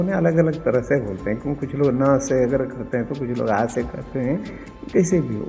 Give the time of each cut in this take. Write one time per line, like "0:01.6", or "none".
none